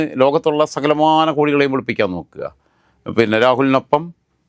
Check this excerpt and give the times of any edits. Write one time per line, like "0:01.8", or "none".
none